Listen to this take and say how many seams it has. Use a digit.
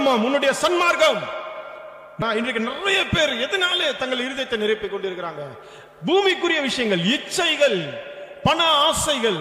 1